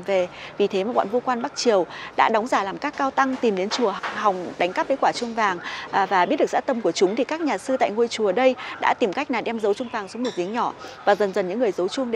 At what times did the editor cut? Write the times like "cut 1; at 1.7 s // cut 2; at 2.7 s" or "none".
none